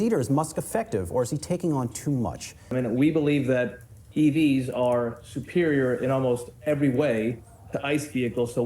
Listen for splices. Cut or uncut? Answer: cut